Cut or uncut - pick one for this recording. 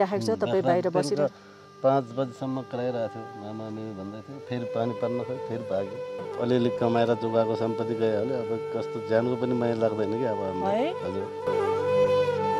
cut